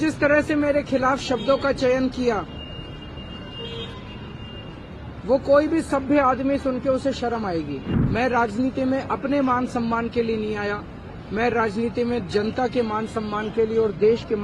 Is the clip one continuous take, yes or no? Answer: no